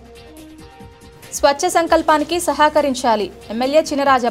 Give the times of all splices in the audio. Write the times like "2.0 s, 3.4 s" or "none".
1.3 s